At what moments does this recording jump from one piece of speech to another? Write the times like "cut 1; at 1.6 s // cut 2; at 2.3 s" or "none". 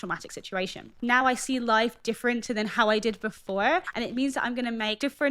cut 1; at 1.0 s